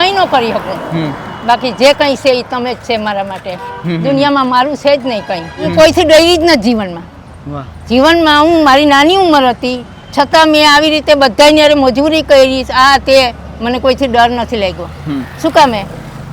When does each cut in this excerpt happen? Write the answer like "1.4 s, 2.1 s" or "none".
5.7 s